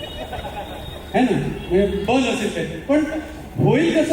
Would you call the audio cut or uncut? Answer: uncut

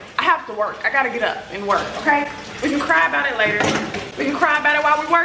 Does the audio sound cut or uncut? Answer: uncut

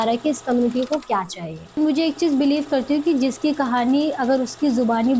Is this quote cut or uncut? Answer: cut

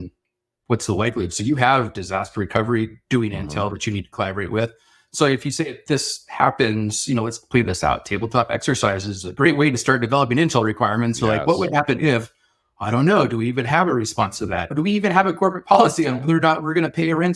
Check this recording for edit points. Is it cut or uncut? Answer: cut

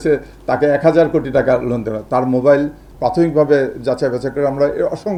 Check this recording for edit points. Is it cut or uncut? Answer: uncut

